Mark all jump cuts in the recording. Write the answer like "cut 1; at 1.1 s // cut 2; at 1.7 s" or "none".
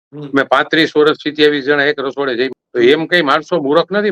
cut 1; at 2.6 s